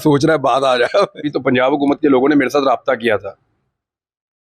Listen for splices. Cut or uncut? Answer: cut